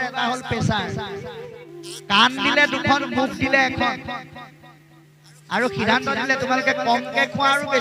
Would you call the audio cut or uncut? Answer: cut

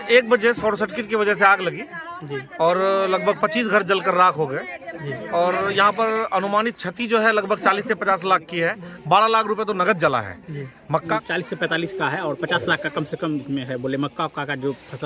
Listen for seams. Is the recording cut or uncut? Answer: cut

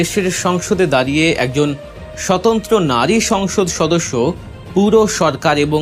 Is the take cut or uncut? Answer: uncut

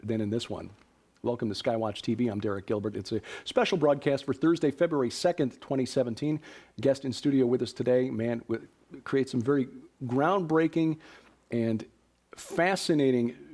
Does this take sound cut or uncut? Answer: cut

